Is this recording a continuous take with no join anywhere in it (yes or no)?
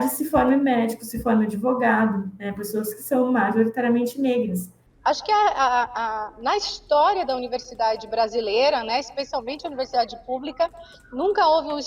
no